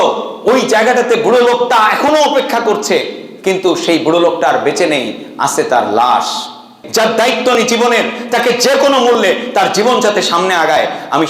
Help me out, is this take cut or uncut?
cut